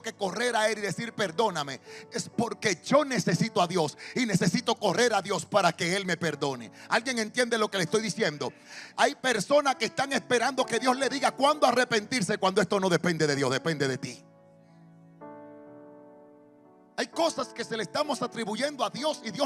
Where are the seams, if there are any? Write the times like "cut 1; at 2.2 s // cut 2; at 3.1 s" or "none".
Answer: none